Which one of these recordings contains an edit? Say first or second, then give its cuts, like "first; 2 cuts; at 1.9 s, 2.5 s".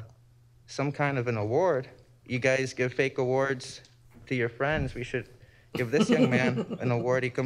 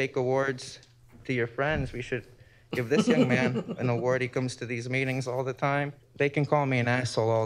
second; 1 cut; at 6.0 s